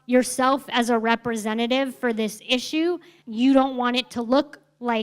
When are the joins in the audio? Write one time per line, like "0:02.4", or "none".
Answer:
0:03.2